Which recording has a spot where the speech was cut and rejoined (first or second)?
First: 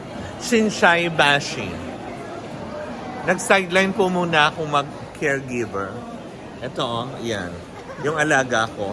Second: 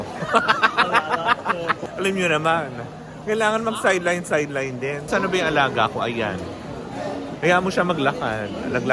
second